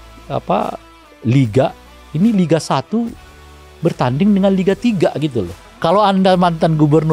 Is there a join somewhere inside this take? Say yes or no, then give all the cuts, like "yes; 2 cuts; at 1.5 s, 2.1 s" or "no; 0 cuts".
yes; 1 cut; at 5.6 s